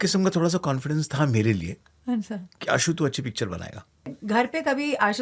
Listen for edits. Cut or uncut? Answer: cut